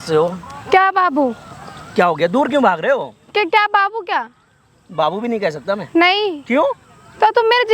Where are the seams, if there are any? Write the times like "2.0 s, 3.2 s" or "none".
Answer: none